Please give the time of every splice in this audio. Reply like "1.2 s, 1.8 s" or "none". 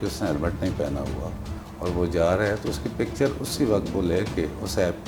none